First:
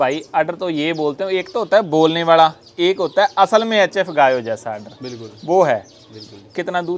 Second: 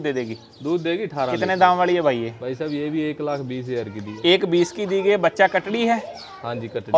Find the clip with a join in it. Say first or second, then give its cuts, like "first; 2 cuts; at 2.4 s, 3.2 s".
second; 1 cut; at 1.3 s